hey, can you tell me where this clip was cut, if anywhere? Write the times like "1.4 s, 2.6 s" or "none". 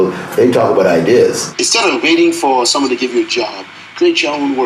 1.5 s

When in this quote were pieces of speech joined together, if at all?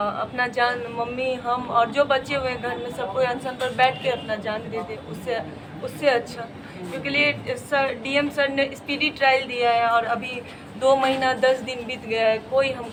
none

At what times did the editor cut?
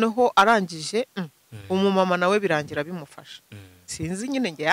none

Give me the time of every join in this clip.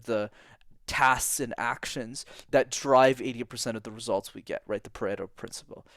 none

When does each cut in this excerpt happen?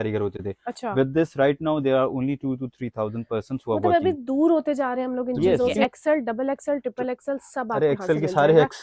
5.8 s

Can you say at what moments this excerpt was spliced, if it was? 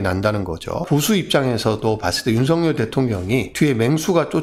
0.8 s, 3.5 s

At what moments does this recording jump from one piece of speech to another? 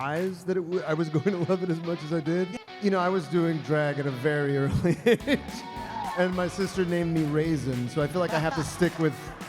2.6 s

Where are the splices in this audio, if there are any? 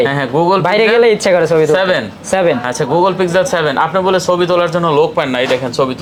none

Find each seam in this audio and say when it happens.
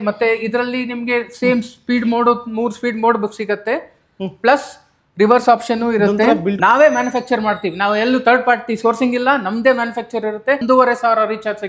6.6 s, 10.6 s

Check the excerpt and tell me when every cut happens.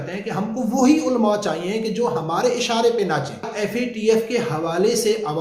3.5 s

